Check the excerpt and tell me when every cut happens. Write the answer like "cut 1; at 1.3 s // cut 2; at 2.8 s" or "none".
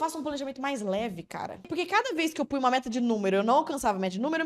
cut 1; at 1.6 s